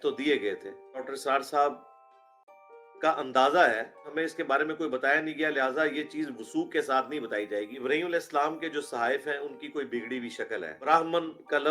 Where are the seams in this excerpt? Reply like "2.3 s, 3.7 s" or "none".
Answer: 1.1 s, 4.1 s, 7.7 s, 10.8 s